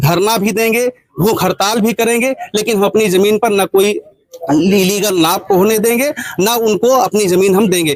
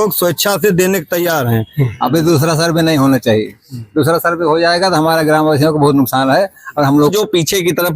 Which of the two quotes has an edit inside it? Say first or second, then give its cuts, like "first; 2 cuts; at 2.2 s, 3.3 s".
second; 2 cuts; at 1.8 s, 7.1 s